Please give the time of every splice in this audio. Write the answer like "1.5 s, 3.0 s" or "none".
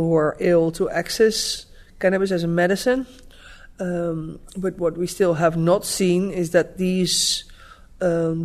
none